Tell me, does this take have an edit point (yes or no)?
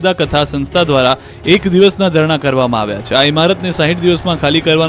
yes